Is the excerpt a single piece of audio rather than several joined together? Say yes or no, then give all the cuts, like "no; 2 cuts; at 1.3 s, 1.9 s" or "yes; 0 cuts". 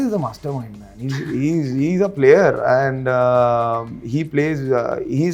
yes; 0 cuts